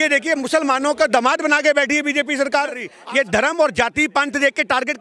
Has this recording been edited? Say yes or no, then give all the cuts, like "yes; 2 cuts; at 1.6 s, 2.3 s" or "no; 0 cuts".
yes; 1 cut; at 2.9 s